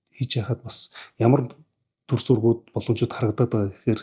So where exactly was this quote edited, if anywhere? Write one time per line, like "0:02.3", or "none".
none